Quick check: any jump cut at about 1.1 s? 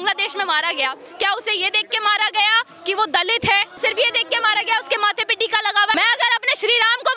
no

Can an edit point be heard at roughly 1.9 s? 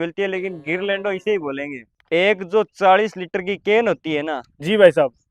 yes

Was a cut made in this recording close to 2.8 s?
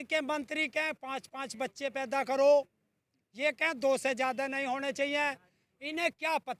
no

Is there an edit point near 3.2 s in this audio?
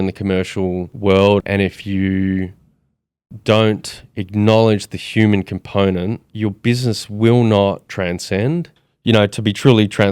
no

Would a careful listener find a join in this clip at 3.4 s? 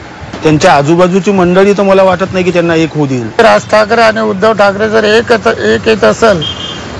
yes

